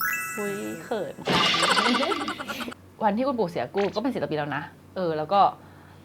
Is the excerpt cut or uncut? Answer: cut